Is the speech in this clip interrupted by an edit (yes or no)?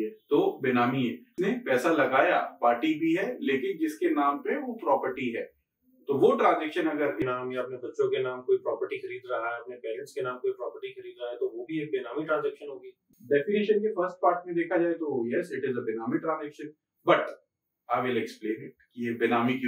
yes